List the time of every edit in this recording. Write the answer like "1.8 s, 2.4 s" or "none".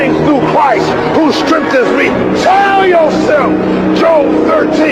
none